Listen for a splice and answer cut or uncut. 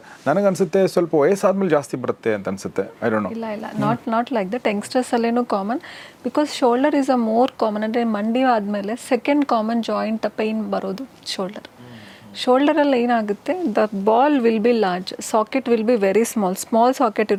uncut